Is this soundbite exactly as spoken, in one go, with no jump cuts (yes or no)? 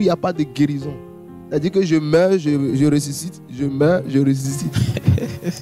yes